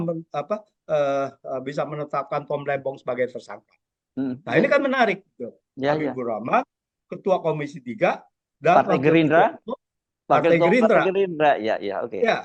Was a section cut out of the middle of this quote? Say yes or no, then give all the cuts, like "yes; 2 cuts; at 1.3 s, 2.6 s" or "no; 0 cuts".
no; 0 cuts